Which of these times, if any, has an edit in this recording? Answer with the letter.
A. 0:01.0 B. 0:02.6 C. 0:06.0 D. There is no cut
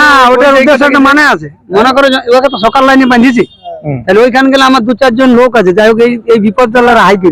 D